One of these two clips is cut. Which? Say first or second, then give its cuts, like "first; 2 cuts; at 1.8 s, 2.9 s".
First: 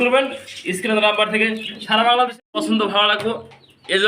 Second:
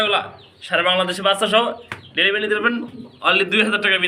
first; 1 cut; at 2.4 s